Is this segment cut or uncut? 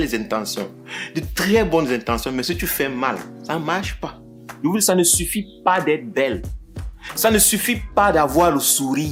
cut